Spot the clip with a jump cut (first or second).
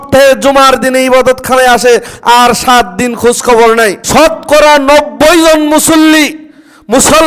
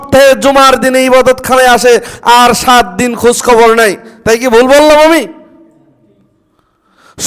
first